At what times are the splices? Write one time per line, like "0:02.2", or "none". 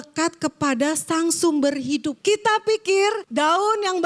0:02.2
0:03.2